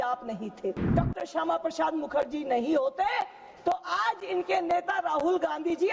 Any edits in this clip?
yes; 1 cut; at 0.9 s

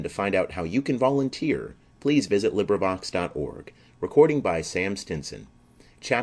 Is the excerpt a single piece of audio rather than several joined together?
yes; 0 cuts

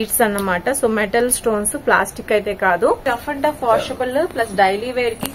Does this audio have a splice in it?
yes; 1 cut; at 3.0 s

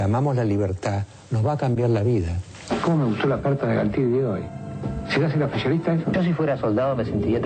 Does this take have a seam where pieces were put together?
yes; 1 cut; at 1.8 s

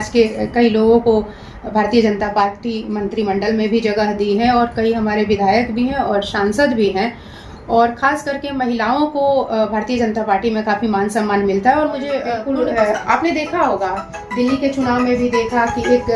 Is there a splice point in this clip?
yes; 1 cut; at 12.3 s

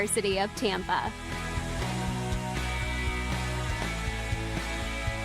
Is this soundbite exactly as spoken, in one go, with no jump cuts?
no; 1 cut; at 1.1 s

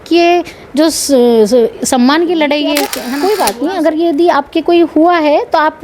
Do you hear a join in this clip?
yes; 1 cut; at 3.0 s

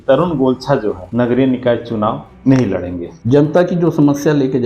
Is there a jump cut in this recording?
yes; 1 cut; at 3.2 s

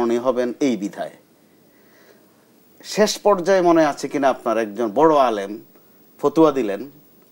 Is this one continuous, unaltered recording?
yes; 0 cuts

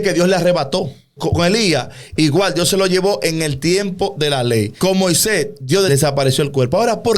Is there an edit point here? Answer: yes; 3 cuts; at 1.2 s, 4.7 s, 5.9 s

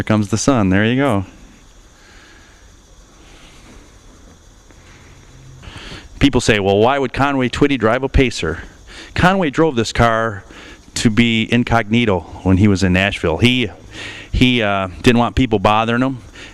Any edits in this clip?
no; 0 cuts

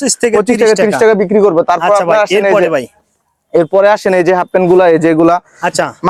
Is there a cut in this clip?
no; 0 cuts

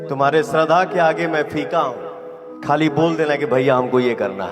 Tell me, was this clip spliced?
yes; 1 cut; at 2.5 s

